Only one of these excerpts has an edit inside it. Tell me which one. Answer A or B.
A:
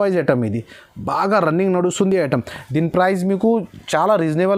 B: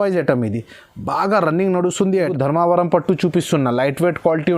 B